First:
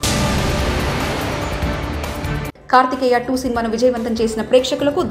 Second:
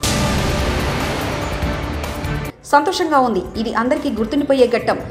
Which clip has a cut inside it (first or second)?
first